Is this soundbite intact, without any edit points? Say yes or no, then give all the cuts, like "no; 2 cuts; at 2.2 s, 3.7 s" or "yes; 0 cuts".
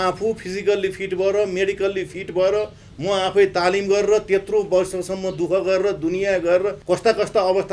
no; 1 cut; at 6.8 s